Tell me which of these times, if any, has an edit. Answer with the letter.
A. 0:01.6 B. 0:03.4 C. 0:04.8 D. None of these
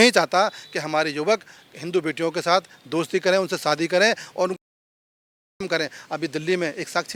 D